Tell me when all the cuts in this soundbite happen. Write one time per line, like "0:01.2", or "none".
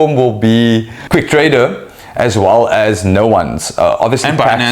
0:01.0